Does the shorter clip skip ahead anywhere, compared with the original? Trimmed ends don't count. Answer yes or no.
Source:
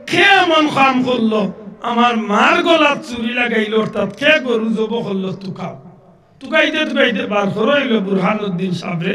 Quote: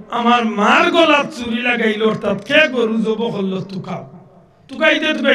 no